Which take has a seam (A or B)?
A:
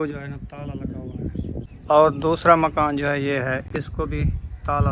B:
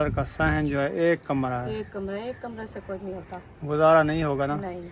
A